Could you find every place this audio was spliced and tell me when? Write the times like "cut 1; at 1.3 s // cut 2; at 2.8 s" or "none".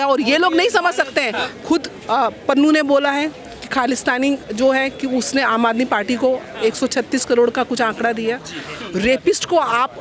cut 1; at 1.3 s // cut 2; at 8.7 s

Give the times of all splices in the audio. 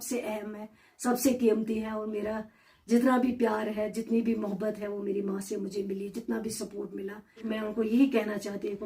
cut 1; at 7.5 s

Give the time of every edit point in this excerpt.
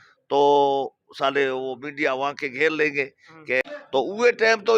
cut 1; at 3.6 s

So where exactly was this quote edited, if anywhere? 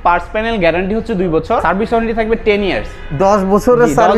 cut 1; at 1.6 s

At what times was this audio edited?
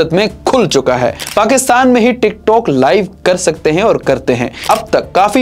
cut 1; at 1.2 s // cut 2; at 4.6 s

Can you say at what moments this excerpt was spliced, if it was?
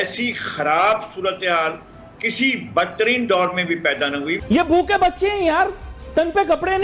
cut 1; at 4.4 s

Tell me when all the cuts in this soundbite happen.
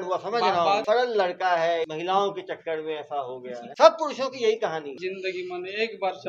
cut 1; at 0.8 s // cut 2; at 1.9 s // cut 3; at 3.6 s // cut 4; at 4.9 s

